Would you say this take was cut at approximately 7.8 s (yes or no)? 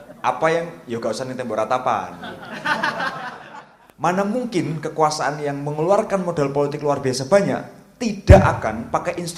no